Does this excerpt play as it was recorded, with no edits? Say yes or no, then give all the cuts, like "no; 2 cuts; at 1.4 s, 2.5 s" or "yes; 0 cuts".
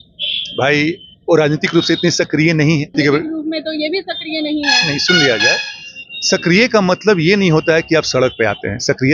no; 1 cut; at 2.9 s